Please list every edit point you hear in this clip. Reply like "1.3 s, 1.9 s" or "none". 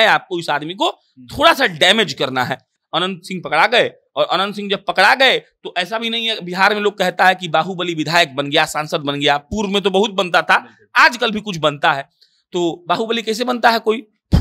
none